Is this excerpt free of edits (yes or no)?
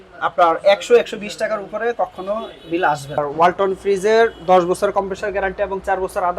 no